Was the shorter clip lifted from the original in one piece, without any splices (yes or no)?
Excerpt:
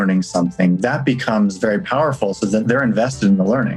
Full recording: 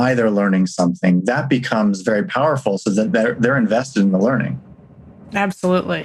no